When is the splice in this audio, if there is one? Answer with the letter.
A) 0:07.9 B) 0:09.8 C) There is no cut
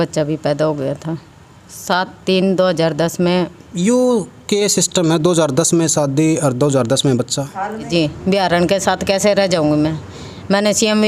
A